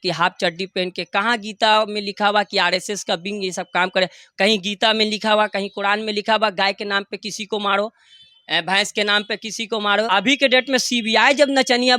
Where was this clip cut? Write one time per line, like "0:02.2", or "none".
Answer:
0:10.1